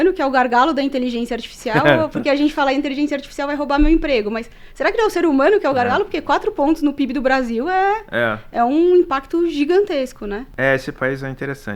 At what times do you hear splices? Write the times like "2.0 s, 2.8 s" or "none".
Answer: none